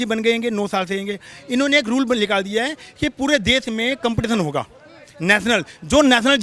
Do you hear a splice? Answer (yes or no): no